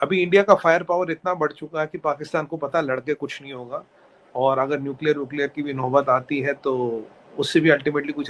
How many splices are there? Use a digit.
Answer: 0